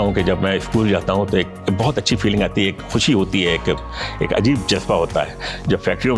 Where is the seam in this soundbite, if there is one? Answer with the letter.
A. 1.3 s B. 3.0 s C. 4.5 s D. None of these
D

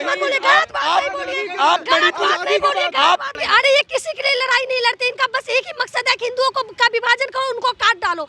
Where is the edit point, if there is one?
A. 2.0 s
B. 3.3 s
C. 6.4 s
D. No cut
B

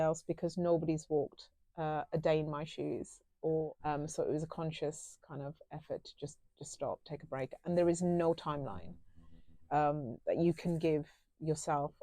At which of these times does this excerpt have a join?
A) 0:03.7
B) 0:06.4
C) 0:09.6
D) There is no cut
A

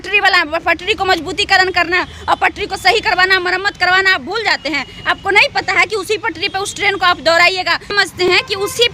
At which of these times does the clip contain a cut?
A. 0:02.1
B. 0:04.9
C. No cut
C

